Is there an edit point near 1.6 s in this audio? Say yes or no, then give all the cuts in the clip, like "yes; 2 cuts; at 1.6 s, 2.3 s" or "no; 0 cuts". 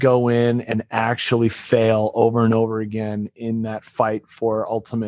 no; 0 cuts